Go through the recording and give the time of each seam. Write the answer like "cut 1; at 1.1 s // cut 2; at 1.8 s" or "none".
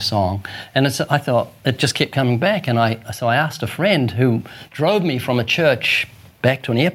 none

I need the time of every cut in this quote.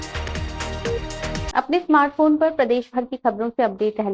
none

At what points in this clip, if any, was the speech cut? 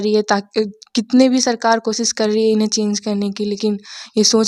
none

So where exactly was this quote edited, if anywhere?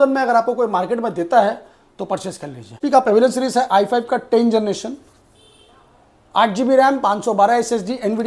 cut 1; at 2.8 s

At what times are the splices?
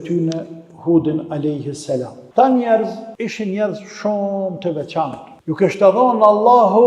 cut 1; at 2.2 s // cut 2; at 3.1 s // cut 3; at 5.3 s

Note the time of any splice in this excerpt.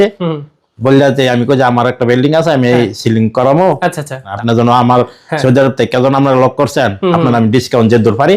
cut 1; at 4.2 s

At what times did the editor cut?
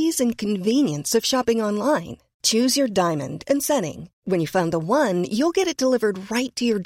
none

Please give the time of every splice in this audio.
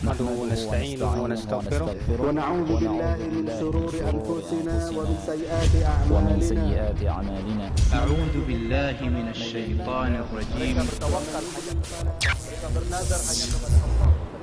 none

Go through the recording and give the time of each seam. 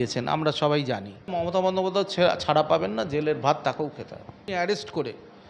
cut 1; at 1.4 s // cut 2; at 4.4 s

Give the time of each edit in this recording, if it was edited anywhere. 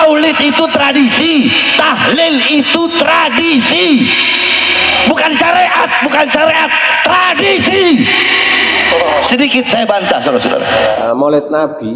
cut 1; at 11.0 s

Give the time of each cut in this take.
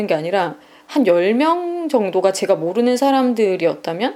none

